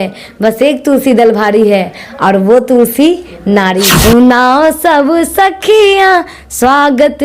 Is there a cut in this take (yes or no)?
yes